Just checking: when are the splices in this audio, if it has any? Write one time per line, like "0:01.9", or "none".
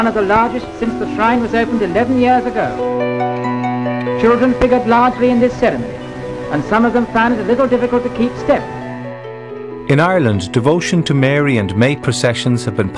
0:04.0